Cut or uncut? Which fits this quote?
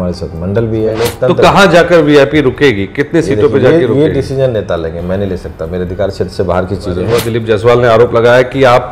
cut